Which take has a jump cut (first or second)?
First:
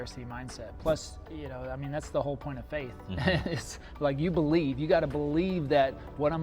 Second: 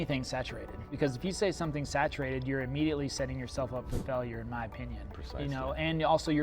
second